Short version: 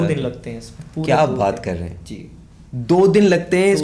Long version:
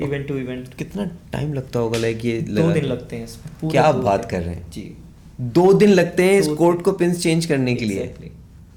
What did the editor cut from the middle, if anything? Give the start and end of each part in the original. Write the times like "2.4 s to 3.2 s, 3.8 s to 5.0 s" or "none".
none